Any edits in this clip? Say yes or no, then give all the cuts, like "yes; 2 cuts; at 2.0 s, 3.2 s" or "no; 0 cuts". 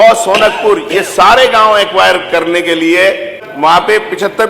yes; 1 cut; at 3.5 s